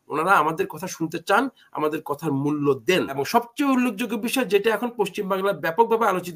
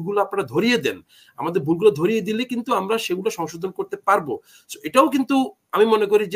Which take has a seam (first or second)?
first